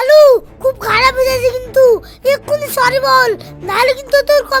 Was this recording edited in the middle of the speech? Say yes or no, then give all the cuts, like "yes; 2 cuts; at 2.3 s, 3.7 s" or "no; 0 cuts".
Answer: no; 0 cuts